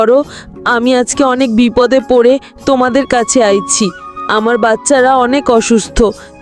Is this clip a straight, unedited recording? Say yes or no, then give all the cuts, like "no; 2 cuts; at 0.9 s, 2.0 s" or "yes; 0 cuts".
yes; 0 cuts